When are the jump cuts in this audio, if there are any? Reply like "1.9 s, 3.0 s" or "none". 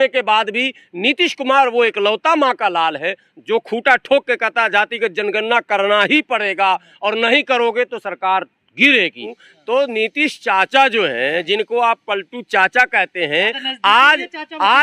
9.4 s